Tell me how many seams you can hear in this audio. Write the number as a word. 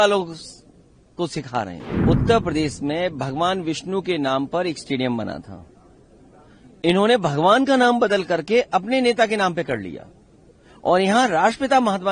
one